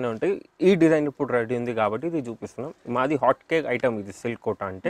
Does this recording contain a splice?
no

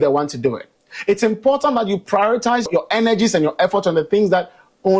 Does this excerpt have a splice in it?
yes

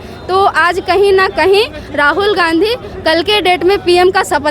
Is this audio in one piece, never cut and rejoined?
yes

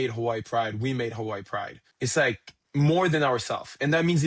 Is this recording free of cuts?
no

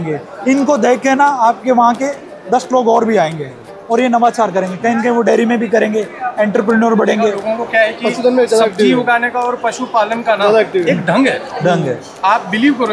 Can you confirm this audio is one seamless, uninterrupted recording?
no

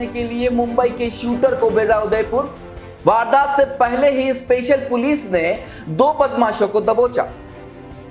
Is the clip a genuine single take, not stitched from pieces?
yes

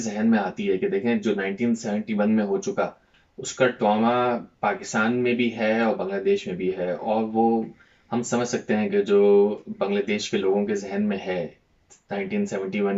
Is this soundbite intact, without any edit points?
yes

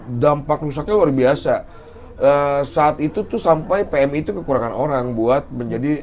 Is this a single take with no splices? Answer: yes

